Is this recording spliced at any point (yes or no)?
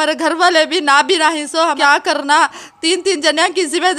yes